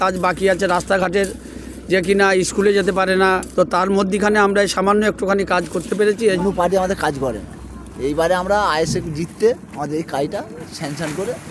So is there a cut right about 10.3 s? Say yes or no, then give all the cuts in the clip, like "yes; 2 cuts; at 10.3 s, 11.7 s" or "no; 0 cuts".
no; 2 cuts; at 3.4 s, 6.4 s